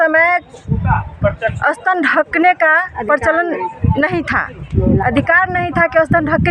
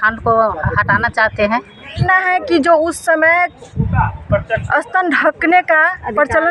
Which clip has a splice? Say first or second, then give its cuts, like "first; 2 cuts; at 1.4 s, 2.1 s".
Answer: second; 1 cut; at 2.0 s